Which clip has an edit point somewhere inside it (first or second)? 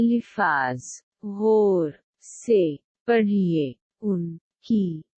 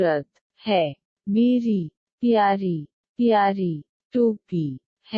second